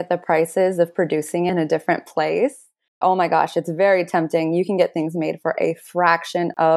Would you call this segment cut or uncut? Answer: cut